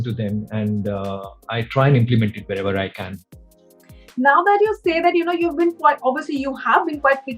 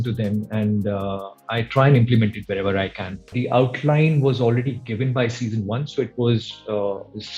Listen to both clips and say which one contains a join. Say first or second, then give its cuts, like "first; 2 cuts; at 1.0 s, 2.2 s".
second; 1 cut; at 3.3 s